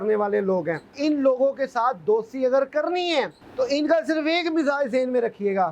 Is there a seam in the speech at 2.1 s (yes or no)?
no